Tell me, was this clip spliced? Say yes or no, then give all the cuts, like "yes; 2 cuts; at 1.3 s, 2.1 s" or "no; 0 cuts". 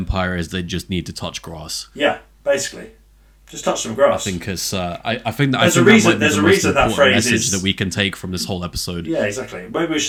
no; 0 cuts